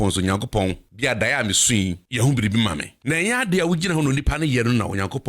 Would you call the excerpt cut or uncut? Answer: cut